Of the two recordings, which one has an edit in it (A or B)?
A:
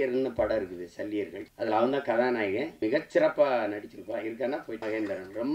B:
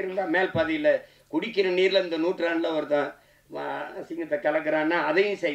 A